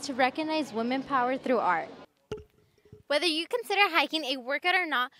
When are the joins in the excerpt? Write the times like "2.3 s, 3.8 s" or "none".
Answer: 2.0 s